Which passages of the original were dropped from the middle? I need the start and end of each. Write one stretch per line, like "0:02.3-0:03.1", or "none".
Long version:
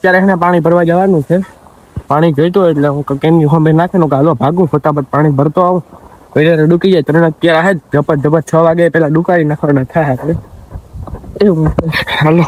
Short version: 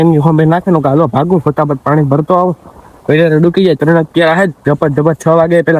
none

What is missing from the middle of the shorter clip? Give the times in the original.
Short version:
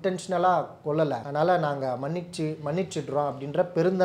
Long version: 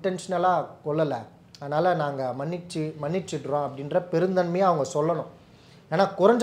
0:01.2-0:01.6

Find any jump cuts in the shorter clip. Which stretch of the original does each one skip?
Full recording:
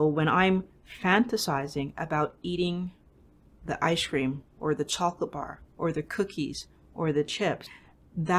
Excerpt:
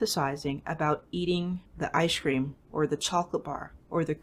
0:03.0-0:03.5

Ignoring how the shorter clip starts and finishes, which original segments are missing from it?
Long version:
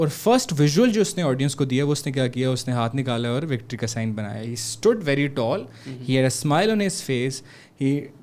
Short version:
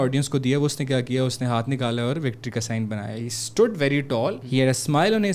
0:05.7-0:06.0

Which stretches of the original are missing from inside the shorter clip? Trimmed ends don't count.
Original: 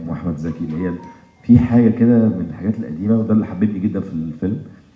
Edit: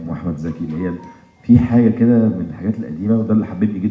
none

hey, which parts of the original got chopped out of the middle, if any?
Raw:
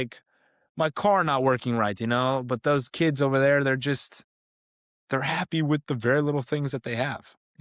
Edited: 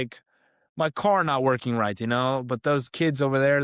none

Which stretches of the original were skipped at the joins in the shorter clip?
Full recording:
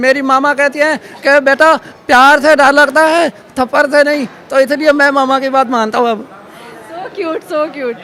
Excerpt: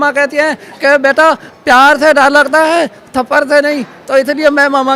none

